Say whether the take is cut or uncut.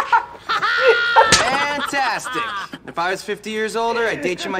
uncut